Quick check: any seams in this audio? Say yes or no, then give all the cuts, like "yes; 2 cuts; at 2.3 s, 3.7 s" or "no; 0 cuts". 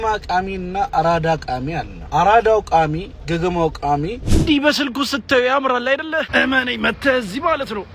yes; 3 cuts; at 1.9 s, 3.1 s, 4.2 s